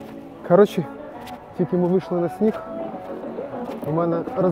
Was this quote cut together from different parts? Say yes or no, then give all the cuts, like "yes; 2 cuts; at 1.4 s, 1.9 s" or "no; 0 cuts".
no; 0 cuts